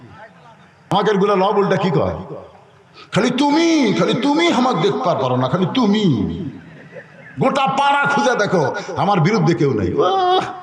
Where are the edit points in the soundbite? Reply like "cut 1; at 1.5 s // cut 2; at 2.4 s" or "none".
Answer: cut 1; at 0.9 s